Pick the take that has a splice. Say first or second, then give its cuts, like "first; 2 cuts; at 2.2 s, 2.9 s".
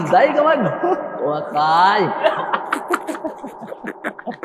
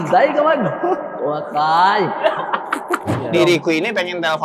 second; 1 cut; at 3.2 s